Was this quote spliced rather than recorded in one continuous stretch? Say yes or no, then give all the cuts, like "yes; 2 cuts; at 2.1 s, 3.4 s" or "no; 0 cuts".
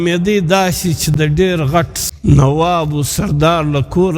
yes; 1 cut; at 2.0 s